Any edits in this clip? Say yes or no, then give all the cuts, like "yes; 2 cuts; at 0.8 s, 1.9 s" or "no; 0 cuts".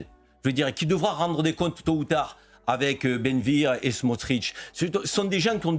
no; 0 cuts